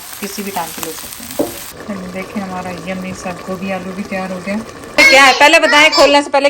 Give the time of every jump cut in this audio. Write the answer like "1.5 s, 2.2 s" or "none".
1.8 s, 5.0 s